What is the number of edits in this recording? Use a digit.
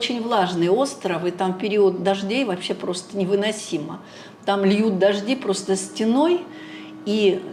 0